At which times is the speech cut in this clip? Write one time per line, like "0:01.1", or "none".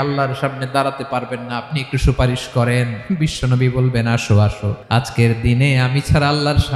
0:04.7